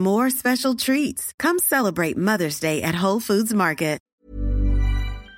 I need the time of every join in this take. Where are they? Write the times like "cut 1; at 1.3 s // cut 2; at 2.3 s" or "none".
cut 1; at 4.0 s